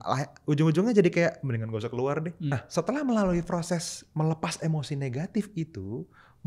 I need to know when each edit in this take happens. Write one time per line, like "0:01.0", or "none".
0:02.5